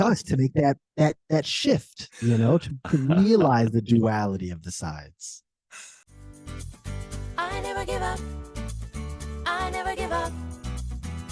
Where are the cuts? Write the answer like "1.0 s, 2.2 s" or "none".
6.2 s